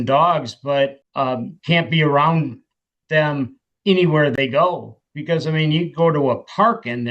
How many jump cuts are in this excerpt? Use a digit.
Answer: 1